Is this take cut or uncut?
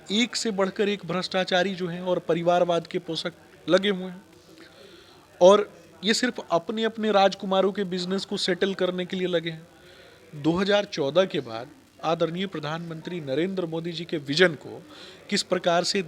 uncut